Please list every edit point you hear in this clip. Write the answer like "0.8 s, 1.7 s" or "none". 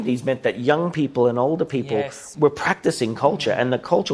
2.2 s